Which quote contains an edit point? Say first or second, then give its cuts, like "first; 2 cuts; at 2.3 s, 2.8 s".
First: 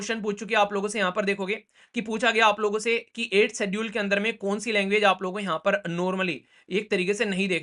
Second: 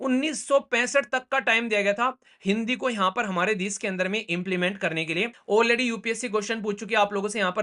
second; 1 cut; at 5.4 s